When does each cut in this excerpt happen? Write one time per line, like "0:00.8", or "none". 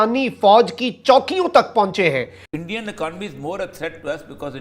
0:02.4